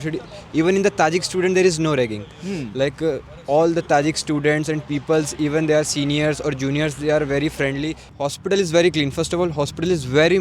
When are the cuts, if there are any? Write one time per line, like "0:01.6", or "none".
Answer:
0:08.0